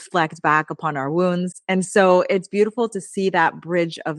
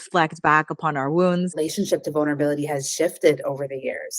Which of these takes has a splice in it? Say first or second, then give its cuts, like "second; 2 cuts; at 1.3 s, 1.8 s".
second; 1 cut; at 1.6 s